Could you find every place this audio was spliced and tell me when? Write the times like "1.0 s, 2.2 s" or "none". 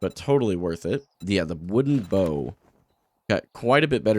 1.1 s